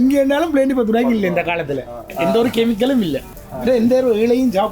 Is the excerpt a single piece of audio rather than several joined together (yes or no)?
no